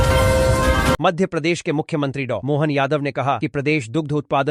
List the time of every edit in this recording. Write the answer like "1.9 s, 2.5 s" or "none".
1.0 s